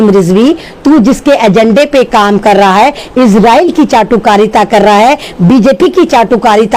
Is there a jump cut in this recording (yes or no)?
no